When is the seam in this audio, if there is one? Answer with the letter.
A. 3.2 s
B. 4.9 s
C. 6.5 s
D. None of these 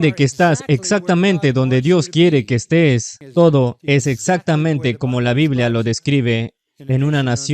A